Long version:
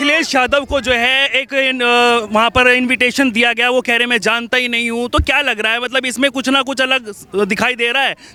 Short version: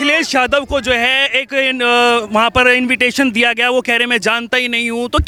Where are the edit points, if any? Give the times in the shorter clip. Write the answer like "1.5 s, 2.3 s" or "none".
none